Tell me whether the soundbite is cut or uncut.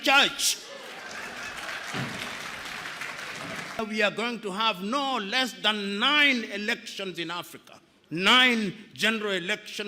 cut